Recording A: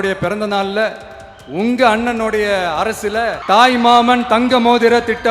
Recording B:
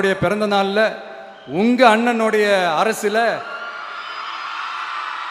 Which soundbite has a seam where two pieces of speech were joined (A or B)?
A